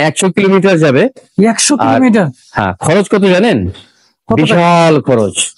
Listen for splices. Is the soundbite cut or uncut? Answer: uncut